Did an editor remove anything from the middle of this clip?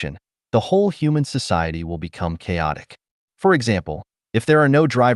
no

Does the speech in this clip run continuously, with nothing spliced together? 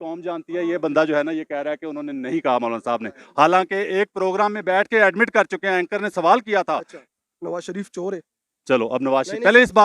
yes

